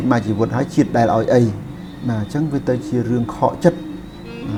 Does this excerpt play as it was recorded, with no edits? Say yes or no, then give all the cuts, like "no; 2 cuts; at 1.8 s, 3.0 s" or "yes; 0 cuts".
yes; 0 cuts